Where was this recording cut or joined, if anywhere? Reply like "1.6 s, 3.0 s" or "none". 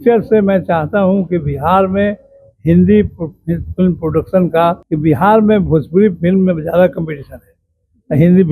4.9 s